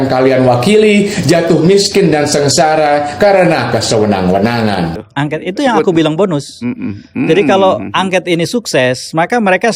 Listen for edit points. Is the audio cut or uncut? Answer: cut